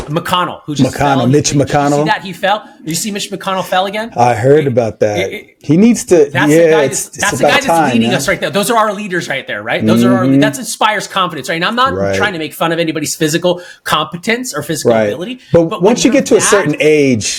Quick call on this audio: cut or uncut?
uncut